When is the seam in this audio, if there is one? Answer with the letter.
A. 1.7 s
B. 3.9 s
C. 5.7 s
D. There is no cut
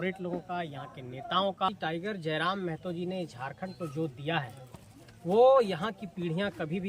A